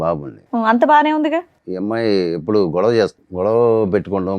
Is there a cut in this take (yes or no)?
yes